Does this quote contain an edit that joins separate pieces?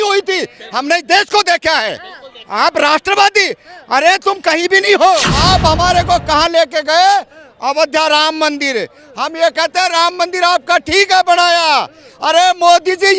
yes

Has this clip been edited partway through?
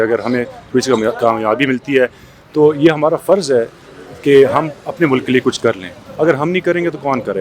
no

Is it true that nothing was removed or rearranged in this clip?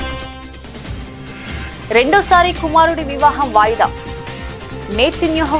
yes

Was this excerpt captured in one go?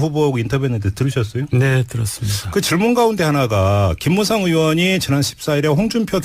no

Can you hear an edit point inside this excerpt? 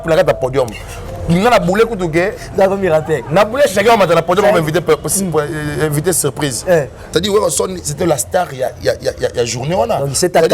yes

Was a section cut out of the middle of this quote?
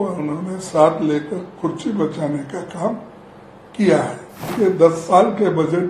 yes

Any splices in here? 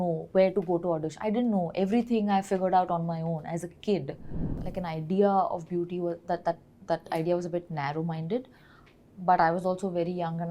yes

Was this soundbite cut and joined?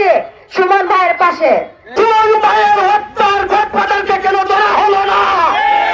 yes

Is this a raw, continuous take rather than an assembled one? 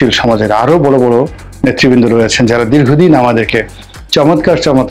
yes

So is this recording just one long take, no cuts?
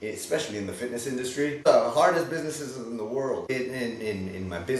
no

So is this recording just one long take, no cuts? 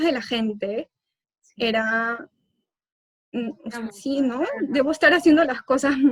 yes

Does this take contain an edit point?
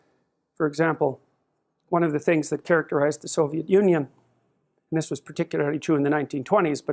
yes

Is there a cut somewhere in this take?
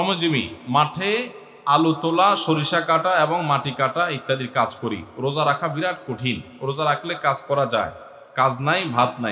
no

